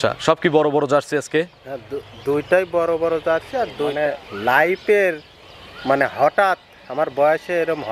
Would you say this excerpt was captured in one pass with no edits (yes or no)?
no